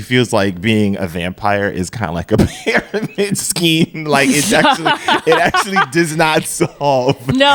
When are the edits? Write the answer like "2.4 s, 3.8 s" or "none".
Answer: none